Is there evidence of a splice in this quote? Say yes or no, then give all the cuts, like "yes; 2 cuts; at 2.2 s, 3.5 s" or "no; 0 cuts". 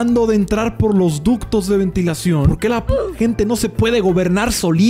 yes; 1 cut; at 2.5 s